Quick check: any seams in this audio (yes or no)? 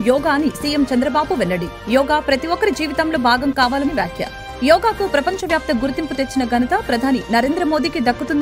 no